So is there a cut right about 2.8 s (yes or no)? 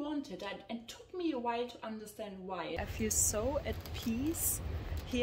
yes